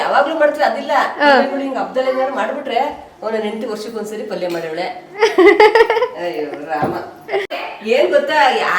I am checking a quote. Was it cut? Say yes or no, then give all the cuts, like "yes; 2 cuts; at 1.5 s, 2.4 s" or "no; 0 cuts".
yes; 1 cut; at 7.7 s